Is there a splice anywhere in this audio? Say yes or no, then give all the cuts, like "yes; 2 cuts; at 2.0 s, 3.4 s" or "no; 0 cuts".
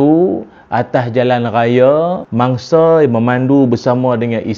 yes; 1 cut; at 2.2 s